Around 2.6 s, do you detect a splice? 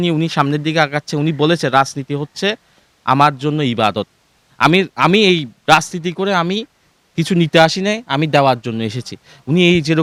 no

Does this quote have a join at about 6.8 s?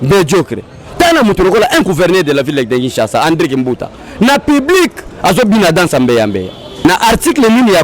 yes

